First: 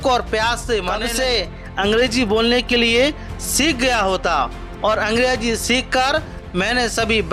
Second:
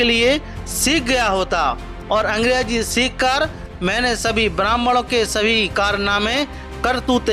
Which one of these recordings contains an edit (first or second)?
first